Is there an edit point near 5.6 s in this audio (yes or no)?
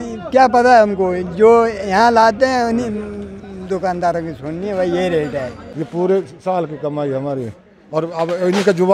yes